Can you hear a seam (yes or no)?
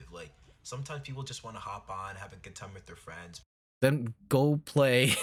no